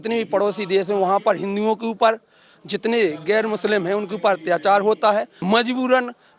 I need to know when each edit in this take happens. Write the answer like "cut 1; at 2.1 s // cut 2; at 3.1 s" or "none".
cut 1; at 5.3 s